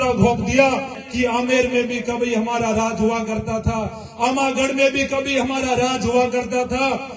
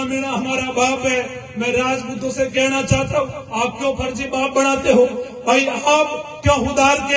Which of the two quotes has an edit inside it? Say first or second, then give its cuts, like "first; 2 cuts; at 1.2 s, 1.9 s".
first; 1 cut; at 1.0 s